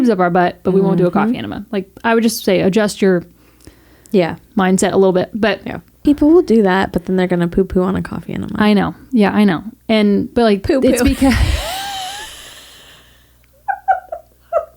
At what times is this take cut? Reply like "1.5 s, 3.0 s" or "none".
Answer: 6.0 s, 10.3 s